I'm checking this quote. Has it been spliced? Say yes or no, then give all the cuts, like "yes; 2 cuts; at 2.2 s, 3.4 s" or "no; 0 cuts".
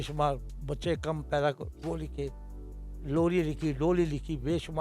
no; 0 cuts